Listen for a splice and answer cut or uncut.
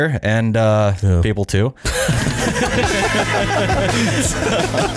uncut